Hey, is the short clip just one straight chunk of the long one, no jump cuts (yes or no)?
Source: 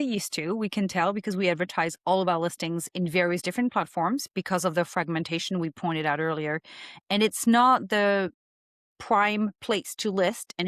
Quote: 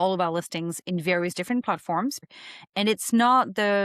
no